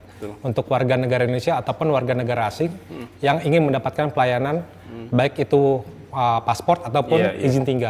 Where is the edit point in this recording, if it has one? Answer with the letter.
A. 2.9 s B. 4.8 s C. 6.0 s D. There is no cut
D